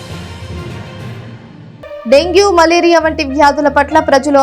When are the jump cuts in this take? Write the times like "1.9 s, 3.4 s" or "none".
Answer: 1.6 s